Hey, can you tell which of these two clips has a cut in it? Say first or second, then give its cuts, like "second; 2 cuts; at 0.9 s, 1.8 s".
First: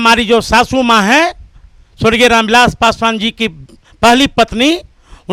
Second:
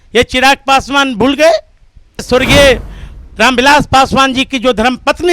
second; 1 cut; at 2.2 s